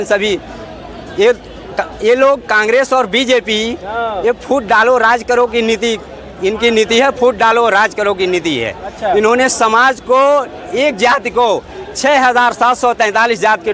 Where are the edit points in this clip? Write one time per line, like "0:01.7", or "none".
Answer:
none